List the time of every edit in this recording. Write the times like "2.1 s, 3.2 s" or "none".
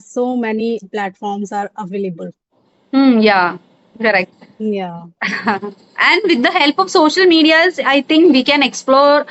none